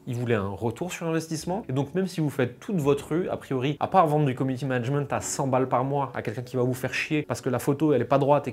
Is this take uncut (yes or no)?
yes